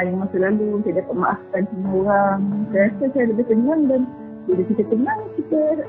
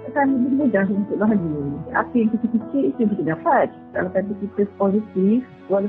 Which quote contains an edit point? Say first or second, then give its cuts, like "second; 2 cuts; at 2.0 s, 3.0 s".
second; 2 cuts; at 1.9 s, 3.9 s